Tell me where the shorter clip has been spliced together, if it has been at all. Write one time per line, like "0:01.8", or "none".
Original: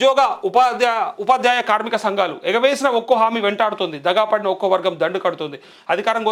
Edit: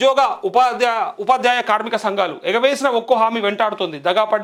none